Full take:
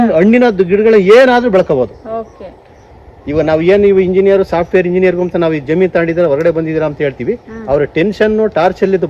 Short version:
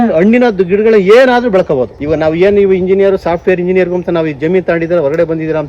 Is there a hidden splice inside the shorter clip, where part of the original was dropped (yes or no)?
yes